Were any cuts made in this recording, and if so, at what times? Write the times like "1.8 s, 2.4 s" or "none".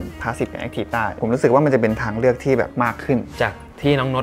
1.1 s, 3.1 s